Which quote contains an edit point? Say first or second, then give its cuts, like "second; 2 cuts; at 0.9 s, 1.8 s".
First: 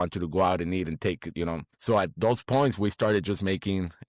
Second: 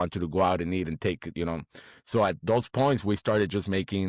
first; 1 cut; at 1.7 s